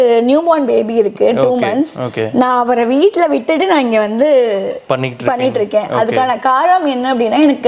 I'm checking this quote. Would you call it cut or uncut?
uncut